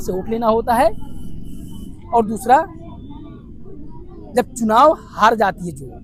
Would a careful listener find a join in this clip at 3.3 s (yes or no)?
no